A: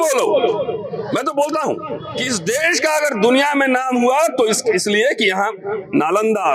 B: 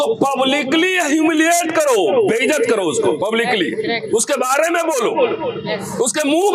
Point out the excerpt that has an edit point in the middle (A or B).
A